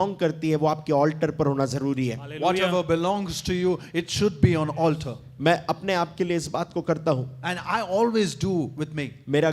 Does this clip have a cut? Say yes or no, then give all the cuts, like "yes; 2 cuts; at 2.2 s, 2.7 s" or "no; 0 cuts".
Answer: no; 0 cuts